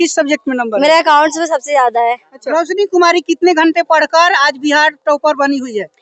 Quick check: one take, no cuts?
no; 1 cut; at 2.3 s

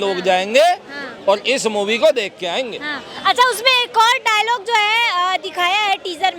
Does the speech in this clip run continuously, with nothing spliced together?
yes; 0 cuts

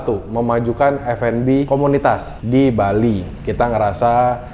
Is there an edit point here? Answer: yes; 2 cuts; at 2.1 s, 3.4 s

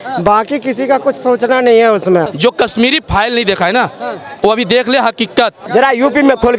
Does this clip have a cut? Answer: yes; 2 cuts; at 2.3 s, 5.6 s

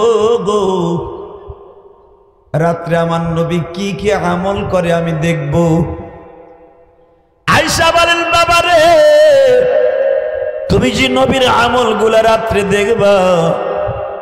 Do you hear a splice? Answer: no; 0 cuts

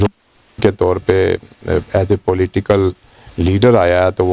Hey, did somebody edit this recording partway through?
no; 0 cuts

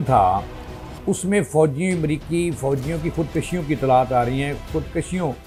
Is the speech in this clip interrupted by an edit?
no; 0 cuts

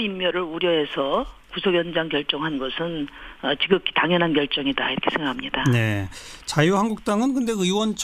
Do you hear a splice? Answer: yes; 1 cut; at 1.7 s

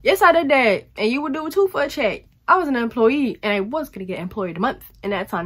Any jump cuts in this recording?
no; 0 cuts

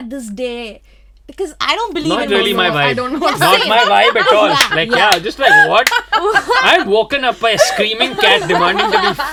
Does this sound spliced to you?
no; 0 cuts

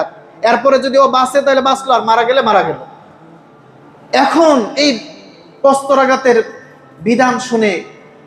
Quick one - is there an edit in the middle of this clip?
no; 0 cuts

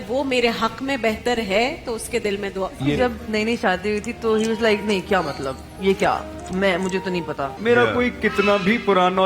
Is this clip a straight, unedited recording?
no; 2 cuts; at 3.0 s, 7.5 s

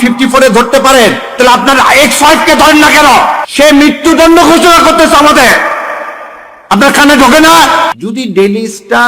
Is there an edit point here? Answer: yes; 2 cuts; at 3.4 s, 7.9 s

